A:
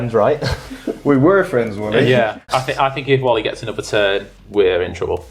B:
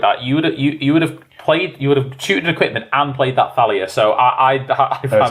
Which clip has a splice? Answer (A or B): A